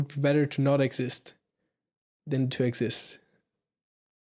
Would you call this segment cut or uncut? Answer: uncut